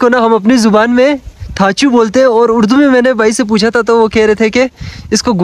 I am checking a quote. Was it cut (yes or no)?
no